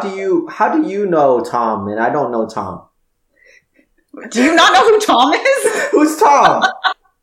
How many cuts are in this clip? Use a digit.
0